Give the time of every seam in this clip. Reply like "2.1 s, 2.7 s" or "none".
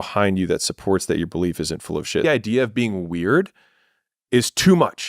2.2 s

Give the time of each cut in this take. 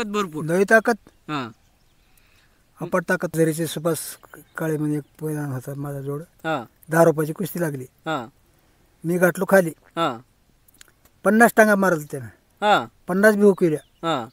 3.3 s

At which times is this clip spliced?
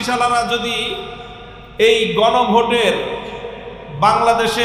none

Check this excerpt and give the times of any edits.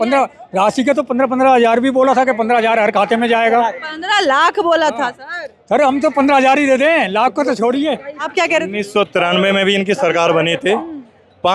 8.3 s

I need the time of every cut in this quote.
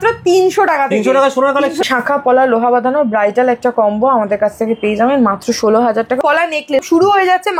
1.9 s, 6.3 s

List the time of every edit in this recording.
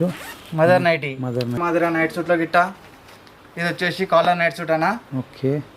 1.6 s

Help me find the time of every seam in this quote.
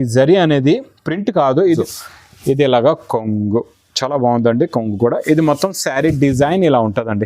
1.8 s

